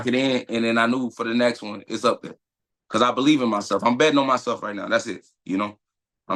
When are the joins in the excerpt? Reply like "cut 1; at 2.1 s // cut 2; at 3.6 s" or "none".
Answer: none